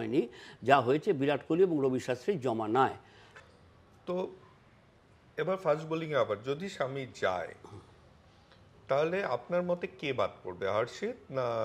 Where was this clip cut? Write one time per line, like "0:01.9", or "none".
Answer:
none